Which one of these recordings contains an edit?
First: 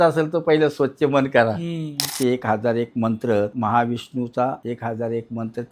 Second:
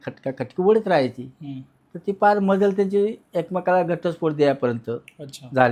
first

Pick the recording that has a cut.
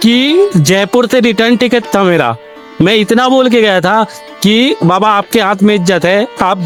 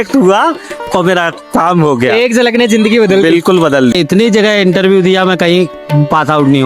second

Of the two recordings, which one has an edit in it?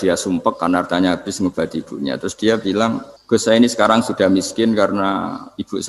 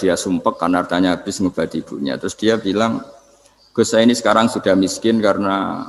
first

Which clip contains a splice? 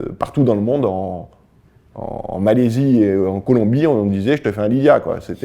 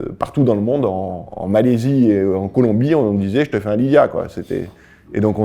second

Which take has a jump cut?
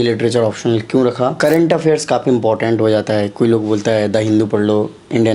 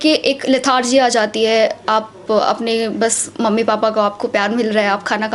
first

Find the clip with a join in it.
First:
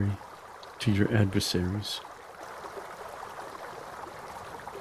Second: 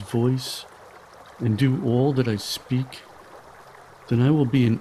first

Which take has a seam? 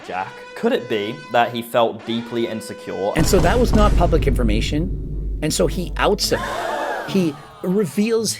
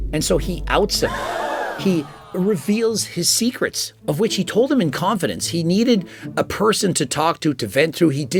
first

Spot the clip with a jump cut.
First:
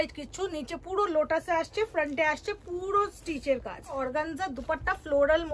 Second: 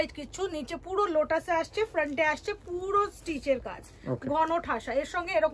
first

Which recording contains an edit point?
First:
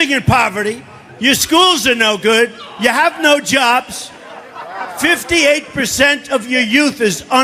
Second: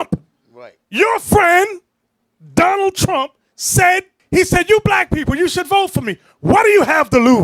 second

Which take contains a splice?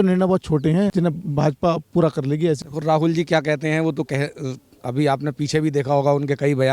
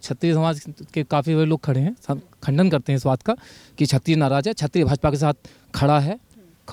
first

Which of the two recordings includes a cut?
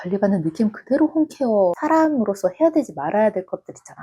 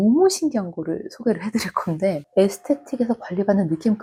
first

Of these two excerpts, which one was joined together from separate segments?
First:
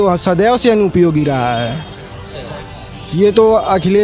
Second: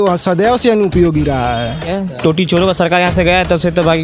second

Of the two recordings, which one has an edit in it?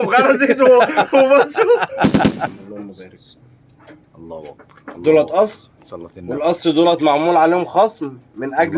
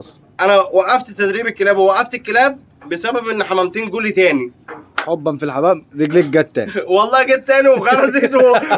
first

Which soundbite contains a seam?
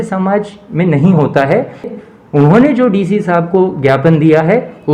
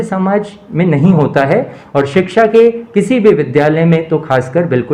first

